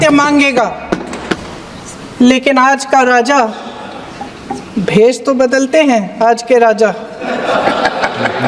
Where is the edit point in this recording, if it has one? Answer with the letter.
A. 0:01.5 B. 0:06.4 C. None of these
A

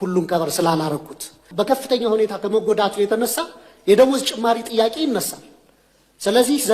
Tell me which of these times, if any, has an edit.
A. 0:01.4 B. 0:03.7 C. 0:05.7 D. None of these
A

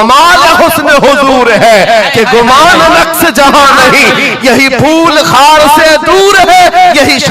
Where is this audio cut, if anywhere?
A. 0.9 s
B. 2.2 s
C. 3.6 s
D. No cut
D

